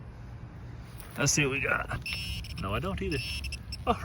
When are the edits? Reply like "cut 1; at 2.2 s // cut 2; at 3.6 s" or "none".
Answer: cut 1; at 2.1 s